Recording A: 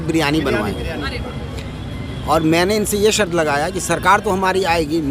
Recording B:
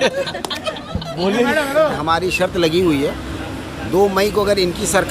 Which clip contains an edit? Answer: B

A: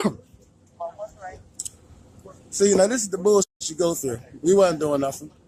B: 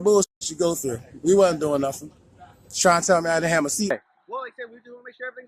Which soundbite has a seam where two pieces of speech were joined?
B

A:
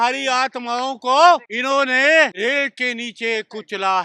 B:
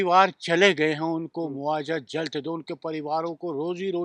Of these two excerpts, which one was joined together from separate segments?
A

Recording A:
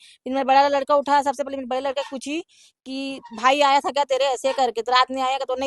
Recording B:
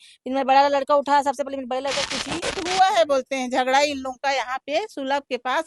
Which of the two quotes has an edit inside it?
B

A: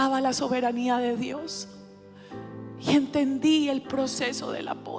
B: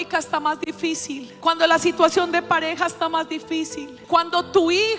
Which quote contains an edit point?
B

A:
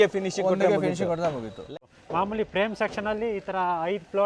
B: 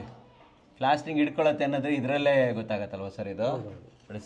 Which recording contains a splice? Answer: A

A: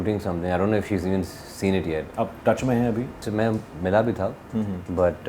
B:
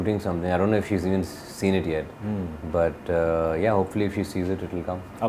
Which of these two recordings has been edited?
A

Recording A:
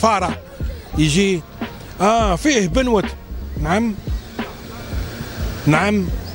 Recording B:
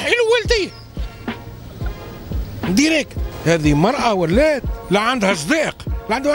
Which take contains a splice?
B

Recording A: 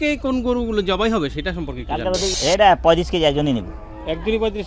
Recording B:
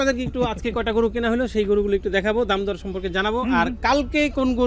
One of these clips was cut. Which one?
A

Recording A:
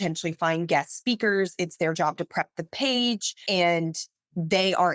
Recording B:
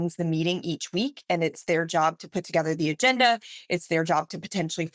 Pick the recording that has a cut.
A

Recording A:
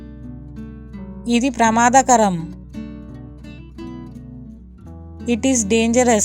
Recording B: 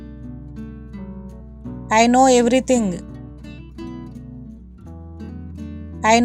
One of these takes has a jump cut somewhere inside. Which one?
A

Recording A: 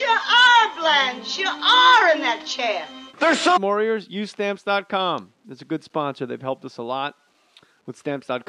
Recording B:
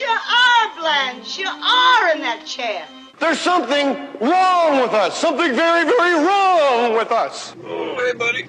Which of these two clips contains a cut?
B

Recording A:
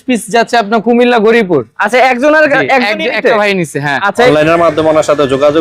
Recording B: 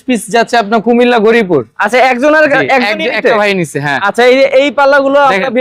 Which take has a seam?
A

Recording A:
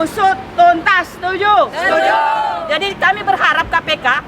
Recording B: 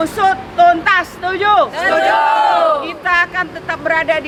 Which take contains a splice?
A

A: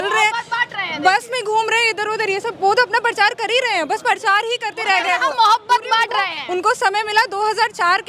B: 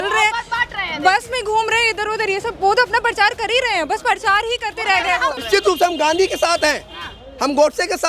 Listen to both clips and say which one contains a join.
B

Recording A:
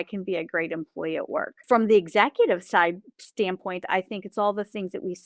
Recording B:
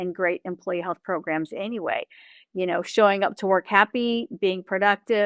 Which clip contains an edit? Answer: A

